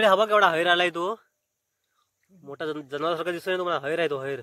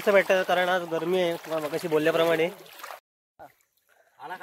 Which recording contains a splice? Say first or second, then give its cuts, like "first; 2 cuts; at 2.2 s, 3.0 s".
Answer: second; 1 cut; at 3.1 s